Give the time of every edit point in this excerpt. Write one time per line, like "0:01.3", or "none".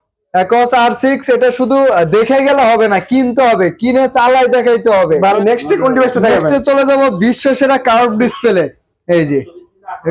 0:05.4

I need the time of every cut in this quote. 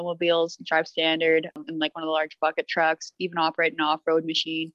0:01.6

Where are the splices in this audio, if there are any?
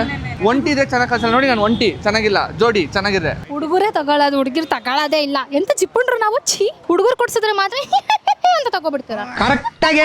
0:03.4

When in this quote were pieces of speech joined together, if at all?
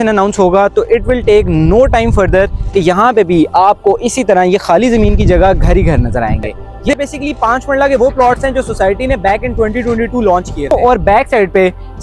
0:07.0
0:10.7

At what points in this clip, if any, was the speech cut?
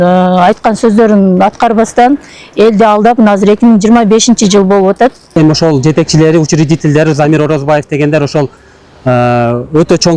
0:05.3

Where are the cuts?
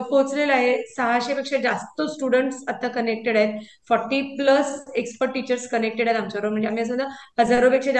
none

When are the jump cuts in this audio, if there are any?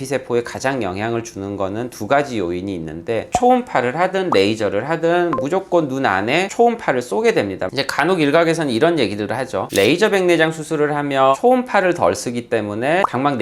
0:03.3
0:07.6

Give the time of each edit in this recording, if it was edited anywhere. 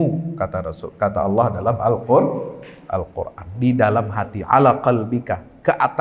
none

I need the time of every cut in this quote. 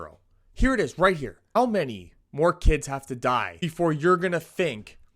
0:01.4
0:03.6

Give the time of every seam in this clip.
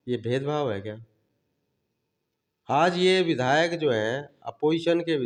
none

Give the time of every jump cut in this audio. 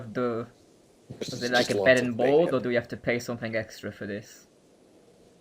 0:01.8

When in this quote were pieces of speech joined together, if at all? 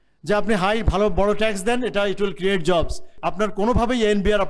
0:03.1

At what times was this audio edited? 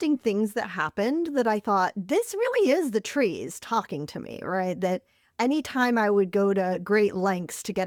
none

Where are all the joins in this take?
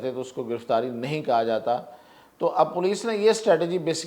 none

